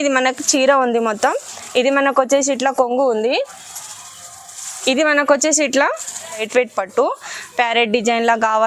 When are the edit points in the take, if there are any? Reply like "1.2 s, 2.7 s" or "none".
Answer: 6.4 s